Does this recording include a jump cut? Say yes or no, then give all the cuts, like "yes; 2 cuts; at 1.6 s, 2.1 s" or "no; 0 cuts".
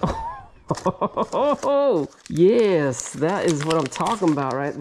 no; 0 cuts